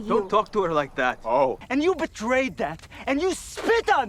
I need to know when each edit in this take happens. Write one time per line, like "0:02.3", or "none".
0:01.6